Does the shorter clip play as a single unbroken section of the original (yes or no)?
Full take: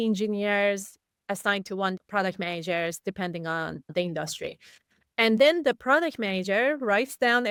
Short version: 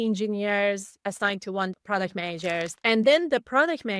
no